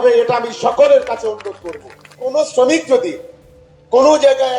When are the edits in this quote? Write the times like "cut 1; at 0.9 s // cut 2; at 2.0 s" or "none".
cut 1; at 2.1 s